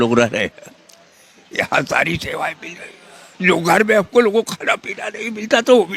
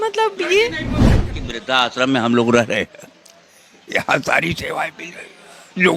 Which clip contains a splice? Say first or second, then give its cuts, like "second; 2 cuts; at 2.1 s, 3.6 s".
second; 1 cut; at 1.3 s